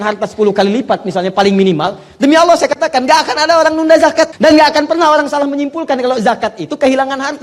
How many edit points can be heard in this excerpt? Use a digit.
1